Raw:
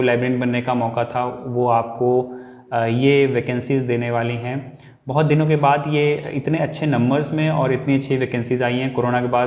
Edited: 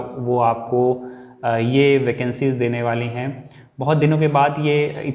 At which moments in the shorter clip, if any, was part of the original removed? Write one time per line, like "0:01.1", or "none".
none